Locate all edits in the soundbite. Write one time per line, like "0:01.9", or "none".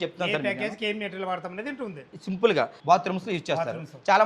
0:02.8